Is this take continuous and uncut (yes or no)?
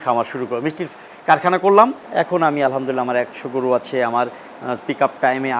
no